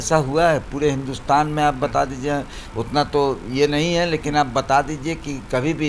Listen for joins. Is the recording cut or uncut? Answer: uncut